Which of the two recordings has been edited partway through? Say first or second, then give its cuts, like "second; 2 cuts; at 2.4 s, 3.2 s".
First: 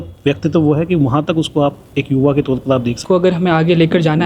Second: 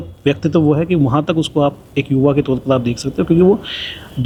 first; 1 cut; at 3.0 s